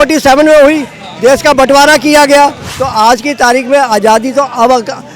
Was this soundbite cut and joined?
yes; 1 cut; at 2.7 s

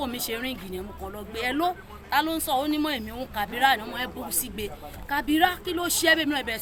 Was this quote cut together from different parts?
no; 0 cuts

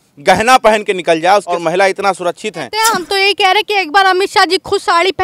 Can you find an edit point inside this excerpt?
yes; 2 cuts; at 1.5 s, 2.7 s

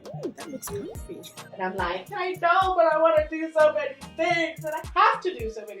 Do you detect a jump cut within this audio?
yes; 1 cut; at 1.5 s

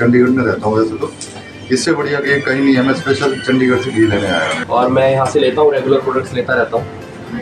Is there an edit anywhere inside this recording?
yes; 1 cut; at 4.6 s

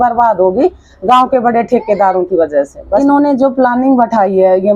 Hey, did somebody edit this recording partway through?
yes; 1 cut; at 3.0 s

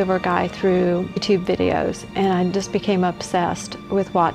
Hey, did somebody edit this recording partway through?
yes; 1 cut; at 1.2 s

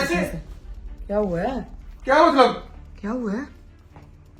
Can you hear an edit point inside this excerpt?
no; 0 cuts

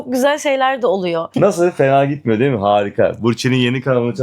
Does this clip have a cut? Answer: yes; 1 cut; at 1.3 s

